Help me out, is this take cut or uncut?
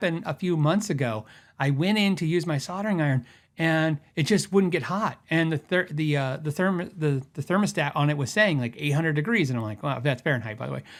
uncut